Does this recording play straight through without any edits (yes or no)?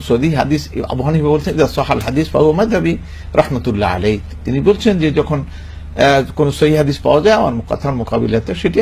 yes